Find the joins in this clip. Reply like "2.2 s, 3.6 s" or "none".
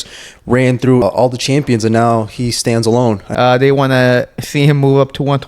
1.0 s, 3.3 s